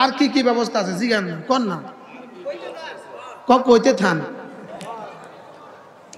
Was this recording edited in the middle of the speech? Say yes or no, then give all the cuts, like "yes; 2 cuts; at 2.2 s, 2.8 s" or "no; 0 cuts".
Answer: no; 0 cuts